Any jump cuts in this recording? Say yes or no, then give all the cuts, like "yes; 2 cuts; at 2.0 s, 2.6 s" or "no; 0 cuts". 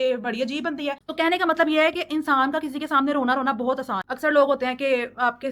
yes; 2 cuts; at 1.0 s, 4.1 s